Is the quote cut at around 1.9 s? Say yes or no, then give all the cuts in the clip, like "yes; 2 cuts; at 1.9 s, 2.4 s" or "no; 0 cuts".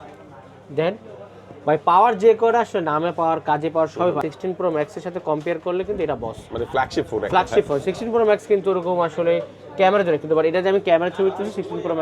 no; 1 cut; at 4.2 s